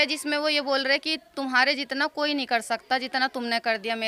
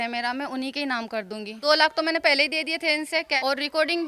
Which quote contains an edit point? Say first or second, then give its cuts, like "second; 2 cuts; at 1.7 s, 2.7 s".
second; 2 cuts; at 1.6 s, 3.3 s